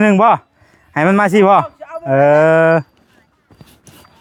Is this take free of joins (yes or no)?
yes